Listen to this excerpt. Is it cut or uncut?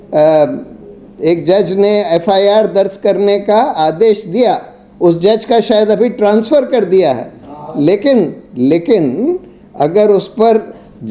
uncut